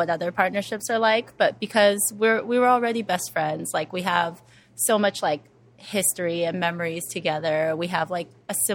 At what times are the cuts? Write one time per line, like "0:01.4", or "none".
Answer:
none